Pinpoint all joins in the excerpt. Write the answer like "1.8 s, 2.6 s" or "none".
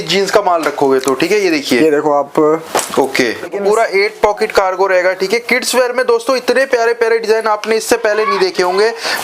3.5 s